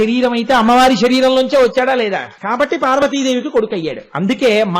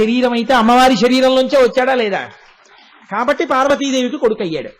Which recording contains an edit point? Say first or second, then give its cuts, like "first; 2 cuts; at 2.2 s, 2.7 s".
first; 1 cut; at 2.3 s